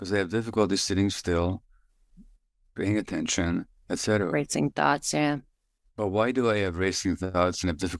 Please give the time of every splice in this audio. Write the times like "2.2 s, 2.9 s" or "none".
none